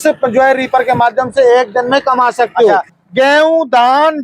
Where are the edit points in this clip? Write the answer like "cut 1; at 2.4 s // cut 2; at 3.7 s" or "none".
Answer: cut 1; at 3.0 s